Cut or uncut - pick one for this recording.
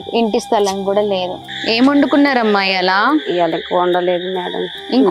cut